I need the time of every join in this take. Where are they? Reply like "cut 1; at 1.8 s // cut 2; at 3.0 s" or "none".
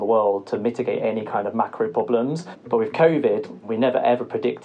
cut 1; at 2.5 s // cut 2; at 3.6 s